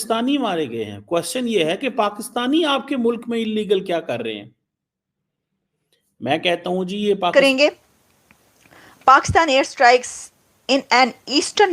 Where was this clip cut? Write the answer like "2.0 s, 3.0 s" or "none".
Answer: 7.3 s